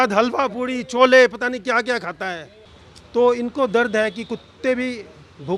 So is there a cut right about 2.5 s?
no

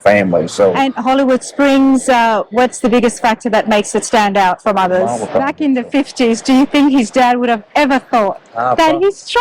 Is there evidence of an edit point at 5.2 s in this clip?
yes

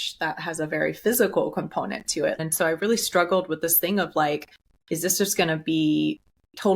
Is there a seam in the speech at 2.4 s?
yes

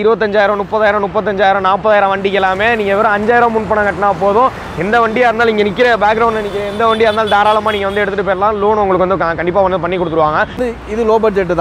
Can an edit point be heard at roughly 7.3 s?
no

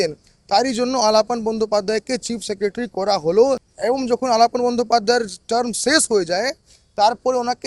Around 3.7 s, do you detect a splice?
yes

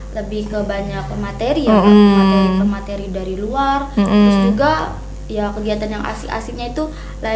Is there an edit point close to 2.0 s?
no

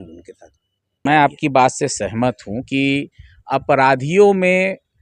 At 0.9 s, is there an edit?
yes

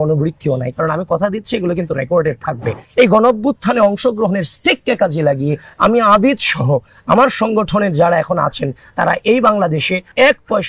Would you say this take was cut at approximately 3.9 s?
no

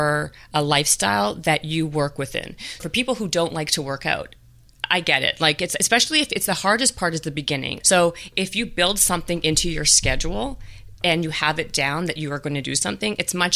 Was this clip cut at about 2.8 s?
yes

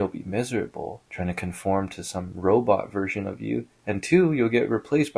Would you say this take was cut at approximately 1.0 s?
yes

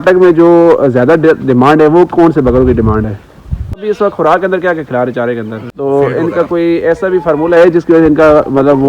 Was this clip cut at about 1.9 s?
no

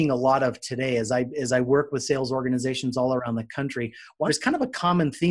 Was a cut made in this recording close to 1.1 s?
no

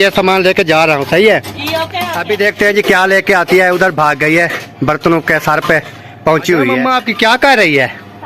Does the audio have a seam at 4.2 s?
no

